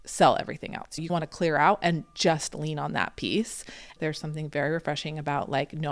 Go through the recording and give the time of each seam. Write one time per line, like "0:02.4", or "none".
0:01.0
0:03.9